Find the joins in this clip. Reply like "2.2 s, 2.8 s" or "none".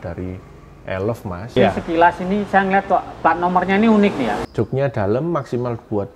1.5 s, 4.4 s

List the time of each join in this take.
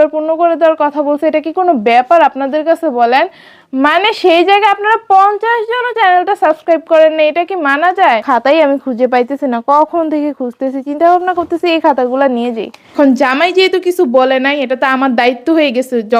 8.2 s, 12.8 s

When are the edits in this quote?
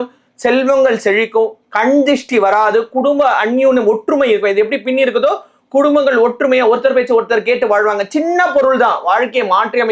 none

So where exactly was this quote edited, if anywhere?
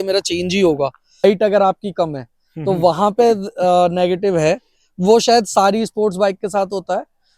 1.2 s

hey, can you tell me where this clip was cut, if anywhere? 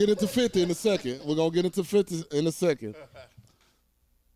none

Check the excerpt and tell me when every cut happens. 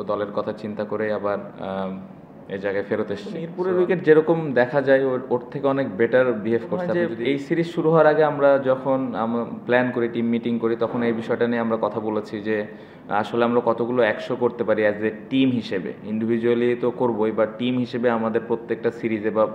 3.5 s, 6.9 s

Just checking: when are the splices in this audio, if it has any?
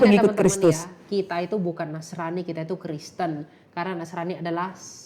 none

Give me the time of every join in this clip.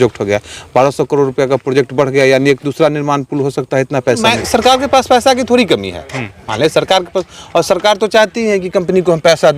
4.2 s

